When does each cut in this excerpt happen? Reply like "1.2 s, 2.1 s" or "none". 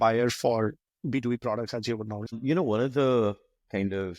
2.2 s

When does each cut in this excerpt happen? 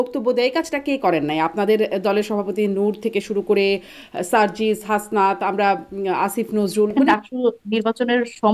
6.9 s

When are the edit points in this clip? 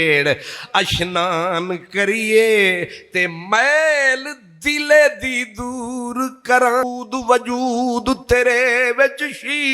6.8 s

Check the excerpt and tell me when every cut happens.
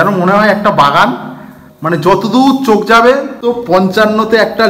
3.4 s

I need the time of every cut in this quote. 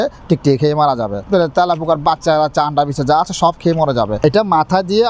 1.2 s, 4.2 s

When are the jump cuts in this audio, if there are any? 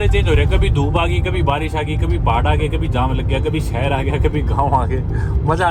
none

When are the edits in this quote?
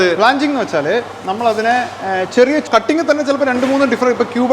2.7 s

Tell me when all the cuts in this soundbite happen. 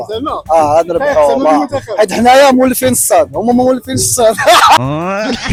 none

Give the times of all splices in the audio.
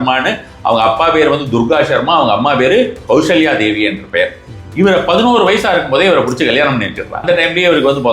7.2 s

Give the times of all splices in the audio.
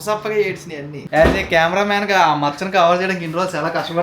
1.0 s

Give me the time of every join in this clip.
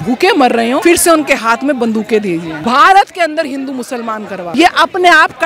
0.8 s, 2.5 s, 4.5 s

